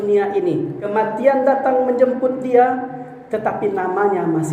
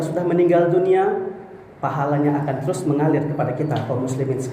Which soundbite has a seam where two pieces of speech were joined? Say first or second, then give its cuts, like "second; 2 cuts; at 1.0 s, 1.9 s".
first; 1 cut; at 0.9 s